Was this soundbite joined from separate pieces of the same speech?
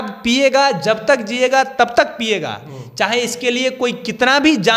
no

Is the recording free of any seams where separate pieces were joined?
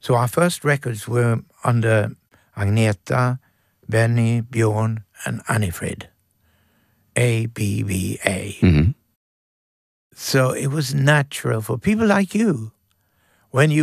yes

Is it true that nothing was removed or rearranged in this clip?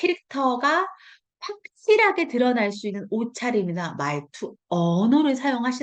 yes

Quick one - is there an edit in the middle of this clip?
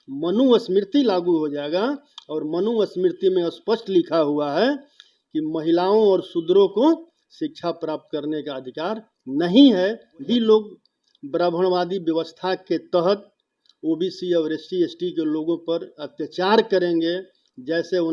yes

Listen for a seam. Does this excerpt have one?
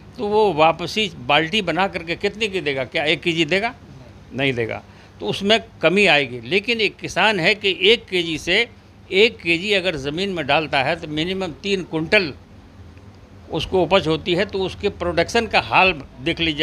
no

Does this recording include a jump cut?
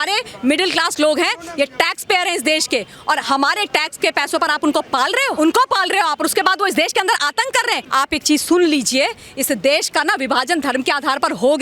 yes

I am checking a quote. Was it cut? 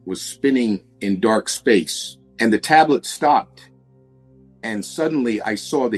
no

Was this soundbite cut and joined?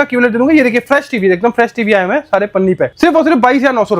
yes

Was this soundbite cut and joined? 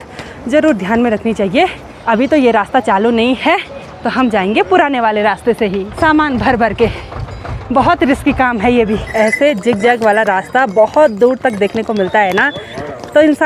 yes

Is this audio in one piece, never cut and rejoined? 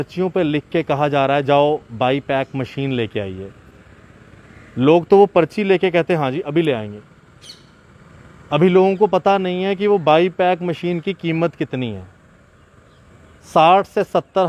yes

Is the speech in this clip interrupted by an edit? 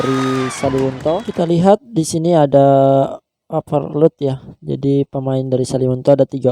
yes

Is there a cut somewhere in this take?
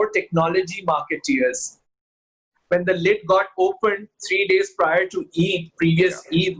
yes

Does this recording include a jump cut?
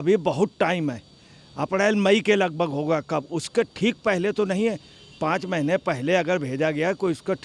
no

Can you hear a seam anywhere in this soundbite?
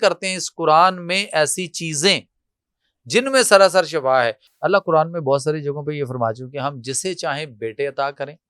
yes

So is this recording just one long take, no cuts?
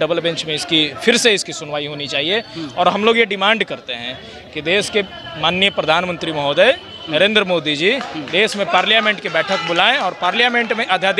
yes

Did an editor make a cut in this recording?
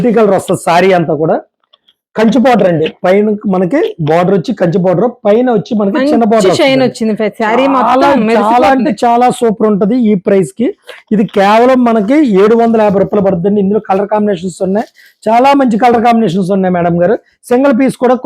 no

